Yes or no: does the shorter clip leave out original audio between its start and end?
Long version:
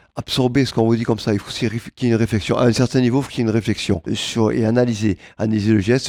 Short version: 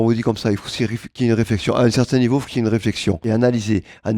yes